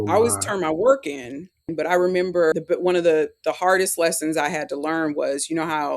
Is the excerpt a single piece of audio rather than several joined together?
no; 2 cuts; at 1.7 s, 2.6 s

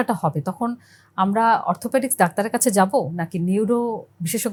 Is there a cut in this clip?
no; 0 cuts

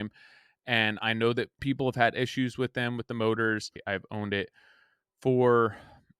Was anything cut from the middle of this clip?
yes; 2 cuts; at 1.6 s, 3.8 s

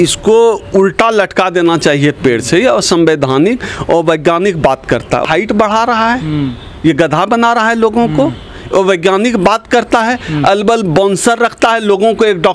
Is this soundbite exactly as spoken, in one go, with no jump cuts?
no; 1 cut; at 5.2 s

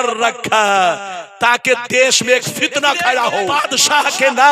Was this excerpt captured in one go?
no; 1 cut; at 3.5 s

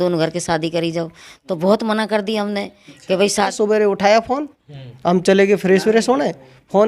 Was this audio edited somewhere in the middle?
yes; 1 cut; at 3.5 s

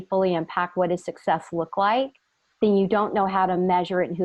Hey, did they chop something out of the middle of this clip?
no; 0 cuts

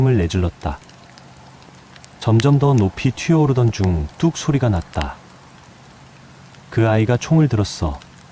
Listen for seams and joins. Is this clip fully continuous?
no; 4 cuts; at 0.8 s, 2.2 s, 5.3 s, 6.7 s

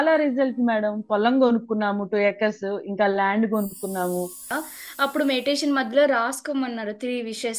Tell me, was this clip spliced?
yes; 1 cut; at 4.5 s

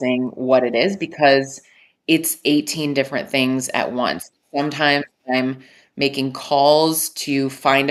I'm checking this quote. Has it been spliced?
no; 0 cuts

